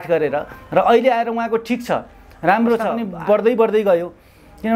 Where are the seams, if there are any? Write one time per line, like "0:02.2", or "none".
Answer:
0:03.0

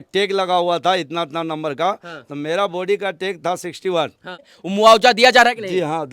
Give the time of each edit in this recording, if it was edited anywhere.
0:04.5

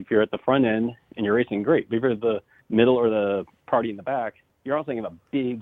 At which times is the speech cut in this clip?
0:02.5
0:03.5
0:04.5

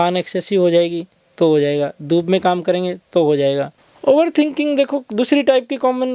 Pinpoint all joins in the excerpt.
0:03.8

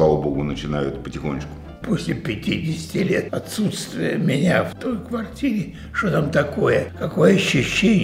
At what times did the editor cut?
0:01.6
0:03.3
0:04.7
0:07.0

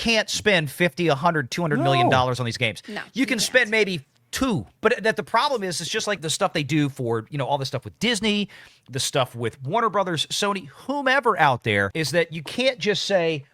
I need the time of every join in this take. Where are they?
0:04.7
0:06.3
0:11.9

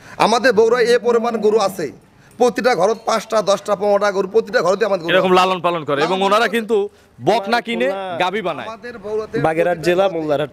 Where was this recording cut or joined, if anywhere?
0:09.3

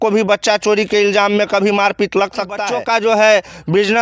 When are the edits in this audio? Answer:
0:02.6

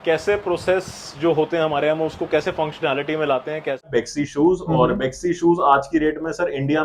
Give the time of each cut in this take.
0:03.9

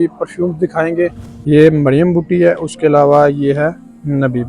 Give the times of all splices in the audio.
0:01.3

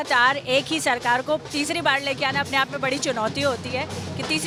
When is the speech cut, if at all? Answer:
none

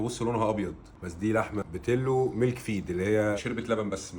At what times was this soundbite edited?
0:01.6
0:03.4

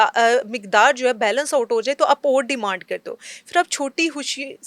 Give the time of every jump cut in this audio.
none

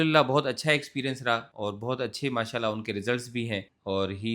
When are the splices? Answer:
0:01.5

